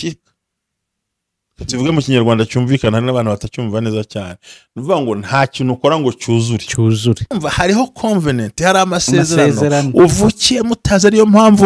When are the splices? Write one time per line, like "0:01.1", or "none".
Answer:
0:07.4